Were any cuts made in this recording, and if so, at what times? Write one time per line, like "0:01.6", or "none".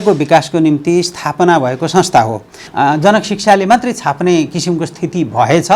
0:02.6